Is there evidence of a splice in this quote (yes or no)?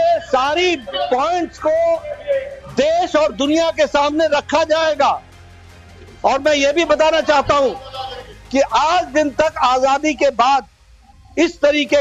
no